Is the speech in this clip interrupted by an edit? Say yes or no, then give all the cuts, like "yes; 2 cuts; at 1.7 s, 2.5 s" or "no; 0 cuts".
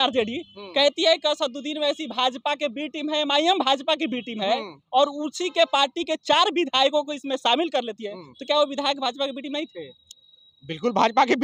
no; 0 cuts